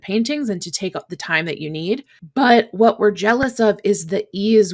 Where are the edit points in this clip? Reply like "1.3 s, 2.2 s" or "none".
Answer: 2.2 s